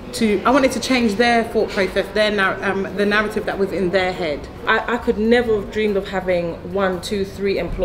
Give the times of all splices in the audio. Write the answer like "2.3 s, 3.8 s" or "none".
4.6 s